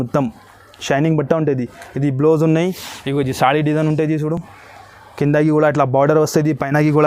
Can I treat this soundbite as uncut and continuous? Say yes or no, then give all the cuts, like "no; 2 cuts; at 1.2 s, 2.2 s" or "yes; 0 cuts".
yes; 0 cuts